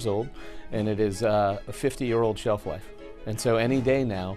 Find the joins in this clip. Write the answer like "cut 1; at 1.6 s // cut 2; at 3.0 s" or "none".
cut 1; at 1.6 s